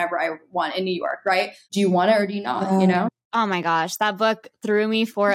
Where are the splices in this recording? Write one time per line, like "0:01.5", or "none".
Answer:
0:01.6
0:03.2